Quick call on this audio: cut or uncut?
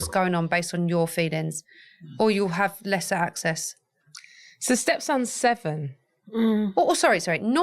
uncut